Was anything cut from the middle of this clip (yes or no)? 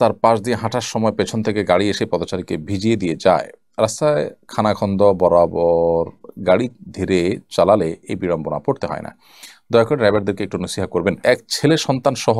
yes